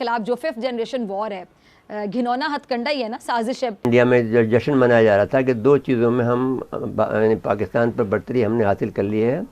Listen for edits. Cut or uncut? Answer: cut